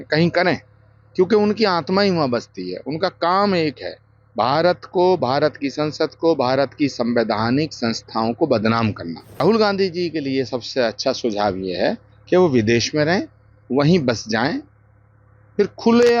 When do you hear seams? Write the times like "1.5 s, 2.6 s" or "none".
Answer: 9.4 s